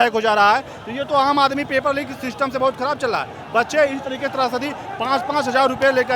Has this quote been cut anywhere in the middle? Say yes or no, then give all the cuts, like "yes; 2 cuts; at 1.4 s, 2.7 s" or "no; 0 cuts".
no; 0 cuts